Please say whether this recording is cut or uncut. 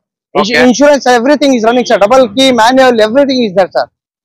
uncut